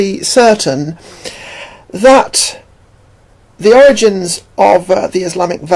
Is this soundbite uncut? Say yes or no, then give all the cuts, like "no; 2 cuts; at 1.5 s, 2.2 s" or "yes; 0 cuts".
no; 1 cut; at 2.2 s